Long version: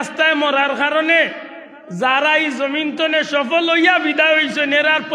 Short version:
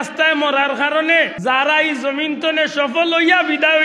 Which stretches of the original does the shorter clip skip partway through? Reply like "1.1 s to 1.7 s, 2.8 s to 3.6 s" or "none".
1.3 s to 1.9 s